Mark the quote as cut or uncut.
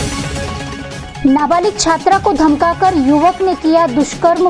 uncut